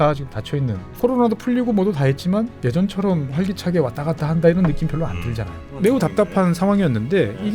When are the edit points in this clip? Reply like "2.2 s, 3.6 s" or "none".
0.9 s, 5.6 s